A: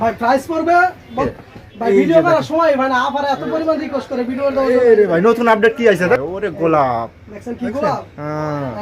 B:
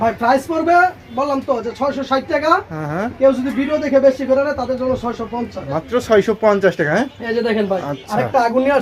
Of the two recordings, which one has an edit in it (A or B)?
A